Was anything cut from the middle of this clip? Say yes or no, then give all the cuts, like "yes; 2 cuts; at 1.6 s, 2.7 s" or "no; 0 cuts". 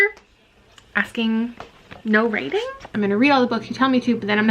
yes; 1 cut; at 2.9 s